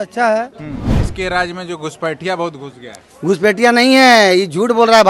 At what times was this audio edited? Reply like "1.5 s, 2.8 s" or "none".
1.1 s